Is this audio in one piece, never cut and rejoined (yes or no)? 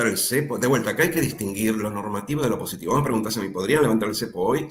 yes